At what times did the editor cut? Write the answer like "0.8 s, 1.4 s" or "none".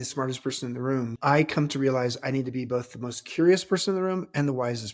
1.1 s